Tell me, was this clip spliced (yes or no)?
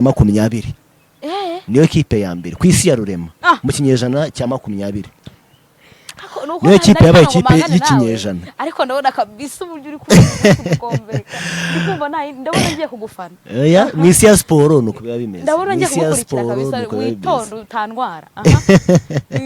no